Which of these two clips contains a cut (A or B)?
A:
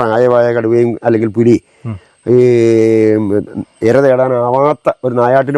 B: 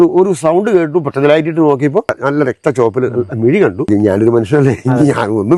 B